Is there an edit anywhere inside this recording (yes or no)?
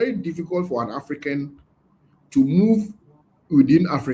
no